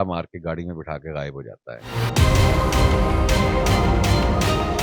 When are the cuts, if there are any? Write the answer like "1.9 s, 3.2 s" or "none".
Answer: 1.8 s